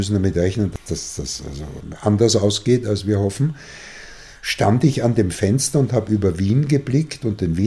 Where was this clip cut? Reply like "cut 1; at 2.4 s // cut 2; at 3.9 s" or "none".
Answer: cut 1; at 0.7 s // cut 2; at 1.8 s